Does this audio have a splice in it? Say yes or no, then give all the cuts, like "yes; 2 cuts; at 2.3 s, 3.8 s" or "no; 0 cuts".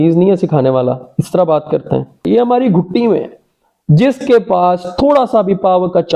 yes; 1 cut; at 2.3 s